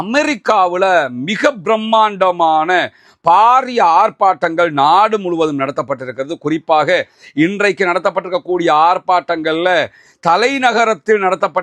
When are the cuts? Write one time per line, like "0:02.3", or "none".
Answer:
none